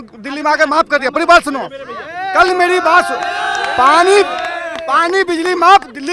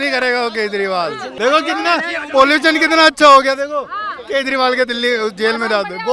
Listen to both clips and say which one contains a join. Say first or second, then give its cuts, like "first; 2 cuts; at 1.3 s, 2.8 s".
second; 1 cut; at 1.3 s